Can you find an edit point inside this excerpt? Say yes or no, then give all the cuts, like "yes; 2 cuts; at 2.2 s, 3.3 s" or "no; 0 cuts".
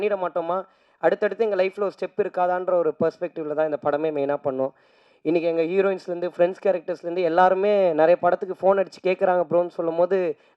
no; 0 cuts